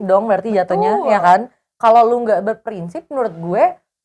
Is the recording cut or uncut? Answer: uncut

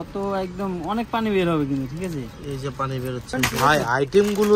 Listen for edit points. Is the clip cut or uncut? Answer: cut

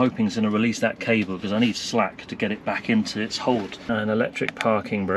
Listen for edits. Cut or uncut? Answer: cut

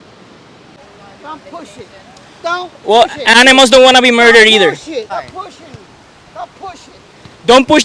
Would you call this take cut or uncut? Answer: cut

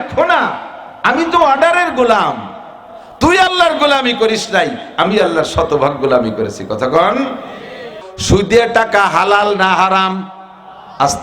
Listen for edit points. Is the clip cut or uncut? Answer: cut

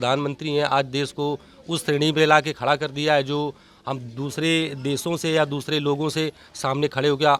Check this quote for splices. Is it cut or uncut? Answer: uncut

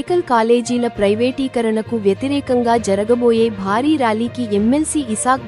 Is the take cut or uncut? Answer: uncut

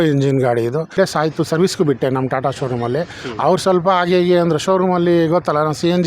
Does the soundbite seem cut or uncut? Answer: cut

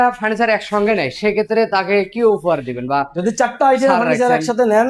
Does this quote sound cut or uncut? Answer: uncut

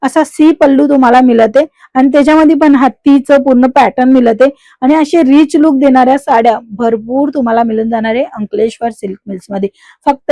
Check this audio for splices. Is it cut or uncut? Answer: uncut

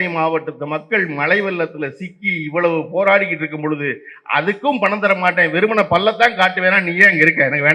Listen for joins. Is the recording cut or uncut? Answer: uncut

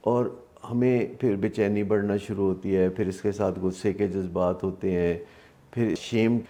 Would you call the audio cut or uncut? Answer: uncut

